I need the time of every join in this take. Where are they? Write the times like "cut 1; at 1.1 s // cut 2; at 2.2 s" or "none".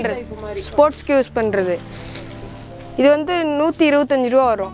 none